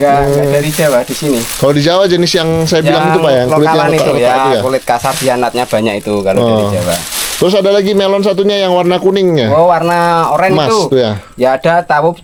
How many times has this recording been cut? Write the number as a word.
zero